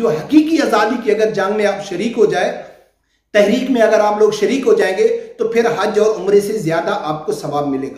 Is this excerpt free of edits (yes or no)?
yes